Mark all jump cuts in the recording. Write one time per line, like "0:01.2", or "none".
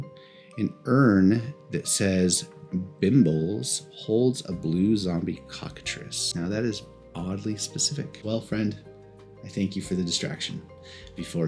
0:06.1
0:08.2